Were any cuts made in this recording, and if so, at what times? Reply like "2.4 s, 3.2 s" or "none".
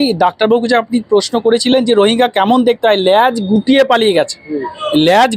none